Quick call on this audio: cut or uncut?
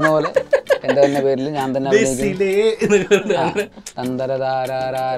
cut